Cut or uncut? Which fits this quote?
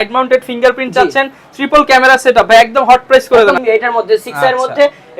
cut